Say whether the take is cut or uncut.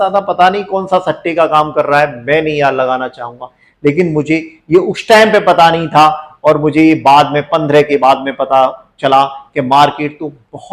uncut